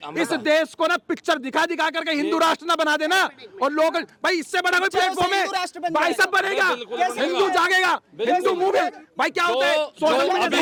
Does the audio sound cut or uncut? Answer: uncut